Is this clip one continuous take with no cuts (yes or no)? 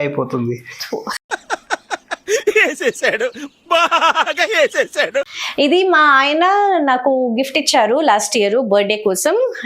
no